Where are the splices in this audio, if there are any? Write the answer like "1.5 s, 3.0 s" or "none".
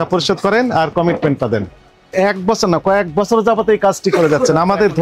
2.1 s